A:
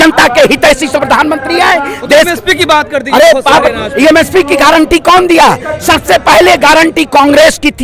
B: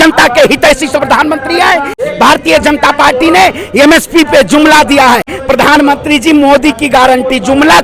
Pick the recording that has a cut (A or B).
B